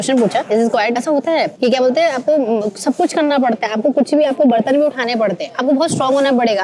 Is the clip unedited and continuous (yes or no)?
yes